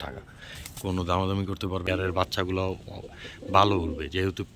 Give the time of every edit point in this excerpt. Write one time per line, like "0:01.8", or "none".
0:01.9

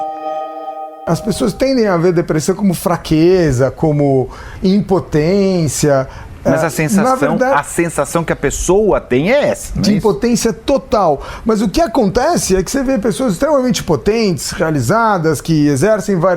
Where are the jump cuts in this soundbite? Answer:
0:00.9

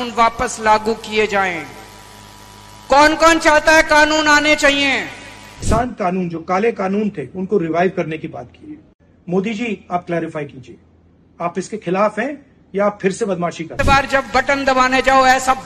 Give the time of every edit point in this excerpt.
0:05.7
0:13.7

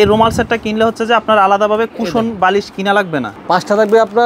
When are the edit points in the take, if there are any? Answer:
0:03.3

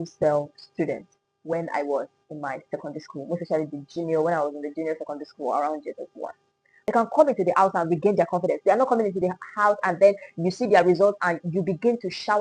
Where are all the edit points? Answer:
0:06.7

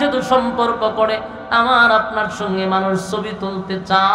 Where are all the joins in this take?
none

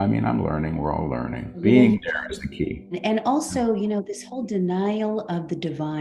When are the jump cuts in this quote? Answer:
0:01.6
0:03.0

